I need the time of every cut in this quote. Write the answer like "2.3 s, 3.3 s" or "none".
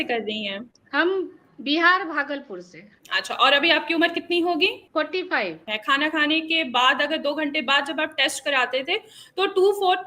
5.6 s